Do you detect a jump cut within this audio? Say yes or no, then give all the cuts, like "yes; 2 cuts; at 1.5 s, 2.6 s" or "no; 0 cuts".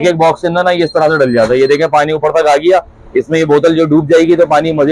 no; 0 cuts